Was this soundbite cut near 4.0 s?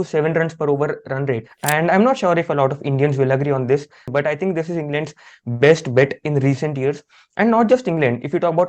yes; 2 cuts; at 1.5 s, 4.0 s

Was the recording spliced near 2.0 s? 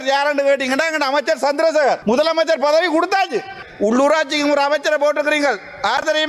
yes; 2 cuts; at 2.0 s, 3.6 s

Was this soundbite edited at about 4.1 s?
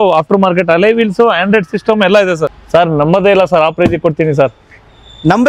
no; 1 cut; at 2.5 s

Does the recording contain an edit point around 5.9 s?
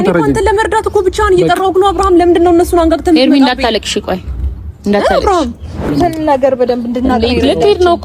yes; 1 cut; at 5.9 s

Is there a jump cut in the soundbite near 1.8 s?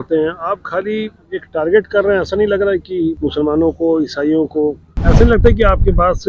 no; 2 cuts; at 3.2 s, 5.0 s

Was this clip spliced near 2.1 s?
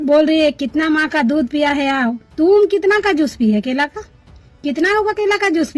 no; 0 cuts

